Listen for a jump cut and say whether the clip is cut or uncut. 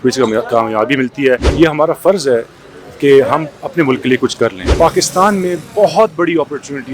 cut